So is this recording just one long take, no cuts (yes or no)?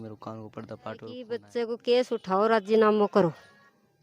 no